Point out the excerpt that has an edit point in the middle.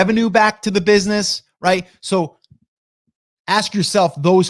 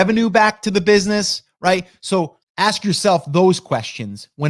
second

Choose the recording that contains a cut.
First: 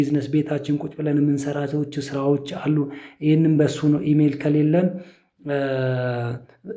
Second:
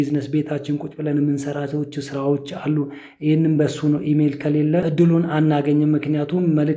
second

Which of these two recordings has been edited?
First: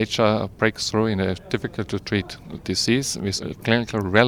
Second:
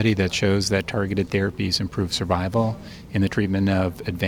first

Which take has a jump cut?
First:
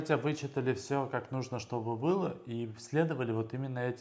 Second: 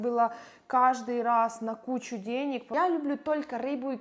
second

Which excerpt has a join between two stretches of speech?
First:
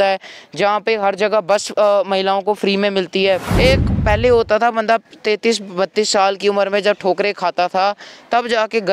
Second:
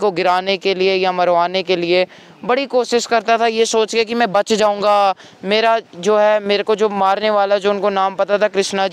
first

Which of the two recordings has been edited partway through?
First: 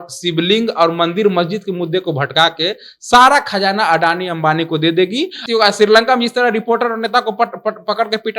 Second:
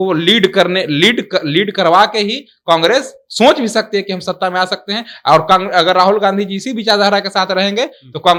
first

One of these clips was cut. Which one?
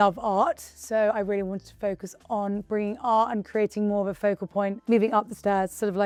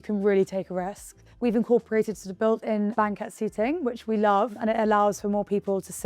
second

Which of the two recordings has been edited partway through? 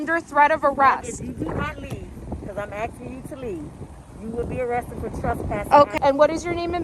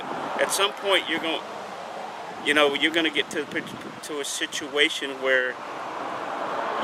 first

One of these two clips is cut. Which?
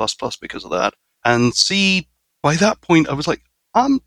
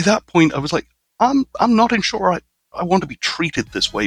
first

